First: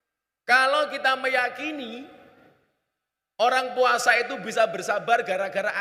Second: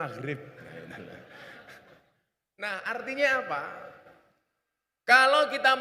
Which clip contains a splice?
second; 1 cut; at 2.7 s

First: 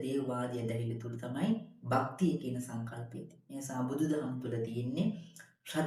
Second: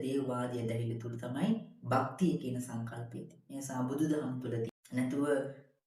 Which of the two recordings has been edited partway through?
second; 1 cut; at 4.7 s

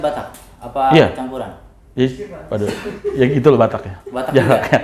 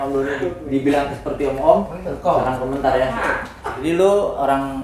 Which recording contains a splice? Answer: second; 1 cut; at 3.8 s

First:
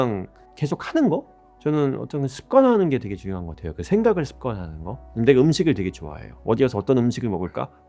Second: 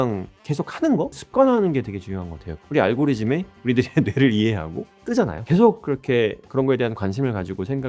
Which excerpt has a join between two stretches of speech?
second; 3 cuts; at 0.8 s, 2.6 s, 5.2 s

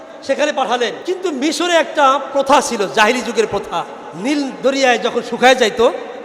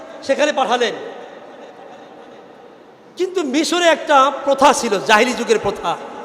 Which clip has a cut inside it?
first; 2 cuts; at 1.0 s, 4.0 s

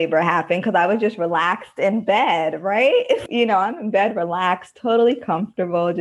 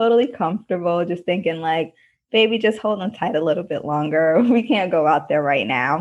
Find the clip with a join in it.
first; 1 cut; at 3.3 s

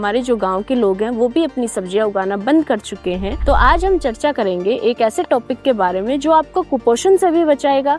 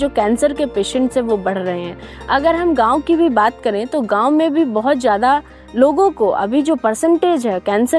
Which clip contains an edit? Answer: first; 1 cut; at 3.3 s

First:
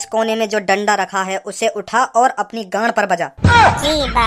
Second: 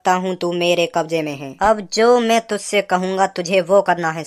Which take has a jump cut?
second; 1 cut; at 1.5 s

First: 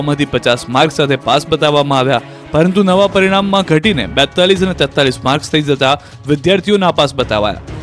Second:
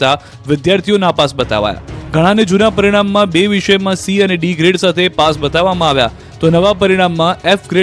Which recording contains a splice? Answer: first; 1 cut; at 1.9 s

